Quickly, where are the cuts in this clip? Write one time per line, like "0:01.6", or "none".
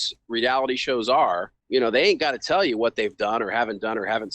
0:01.5